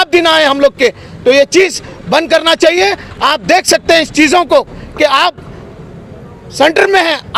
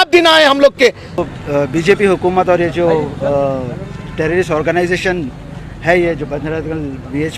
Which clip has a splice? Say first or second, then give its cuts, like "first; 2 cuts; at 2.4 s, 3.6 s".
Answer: second; 1 cut; at 1.2 s